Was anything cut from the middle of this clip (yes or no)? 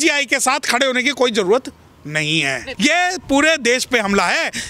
yes